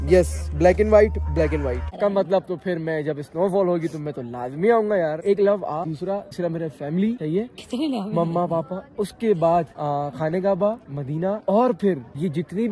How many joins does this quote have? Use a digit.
1